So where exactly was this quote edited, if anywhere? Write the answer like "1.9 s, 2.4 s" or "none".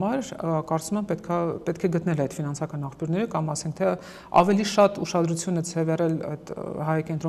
none

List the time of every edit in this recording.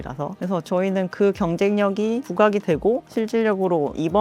none

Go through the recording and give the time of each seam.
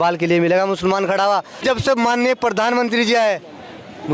1.6 s

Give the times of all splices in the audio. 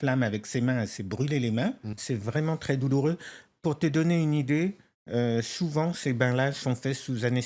2.0 s

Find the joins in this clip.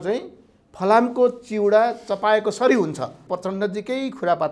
3.2 s

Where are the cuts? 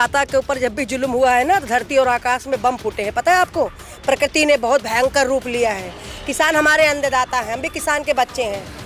none

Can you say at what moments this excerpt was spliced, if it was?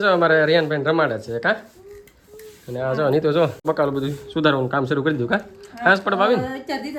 none

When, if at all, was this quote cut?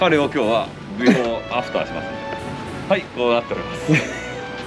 none

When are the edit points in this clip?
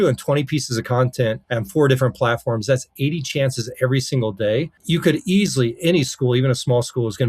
1.4 s, 4.8 s

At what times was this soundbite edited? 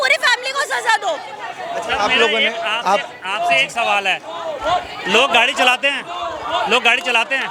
none

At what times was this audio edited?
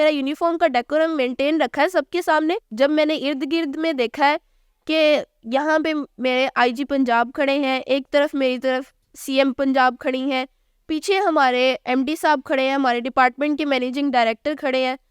2.7 s

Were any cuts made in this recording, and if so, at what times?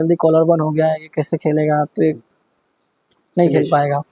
none

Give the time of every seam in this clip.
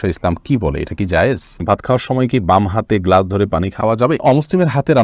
1.6 s, 4.0 s

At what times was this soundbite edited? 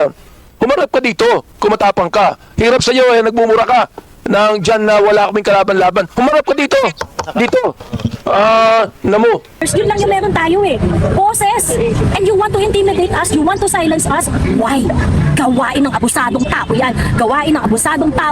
9.6 s

